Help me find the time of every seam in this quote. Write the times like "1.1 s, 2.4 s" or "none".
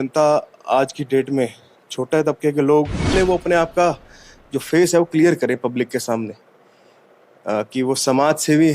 3.1 s